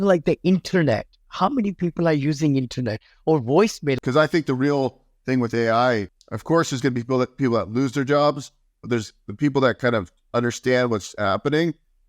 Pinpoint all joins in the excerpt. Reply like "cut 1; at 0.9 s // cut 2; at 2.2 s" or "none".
cut 1; at 4.0 s // cut 2; at 6.1 s

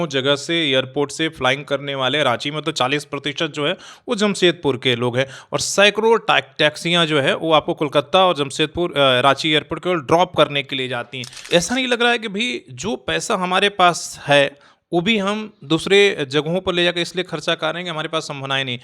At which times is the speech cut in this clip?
cut 1; at 11.5 s

